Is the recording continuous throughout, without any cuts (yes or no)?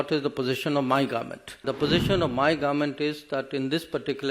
no